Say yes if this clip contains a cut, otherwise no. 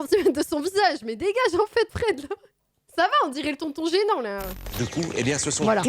yes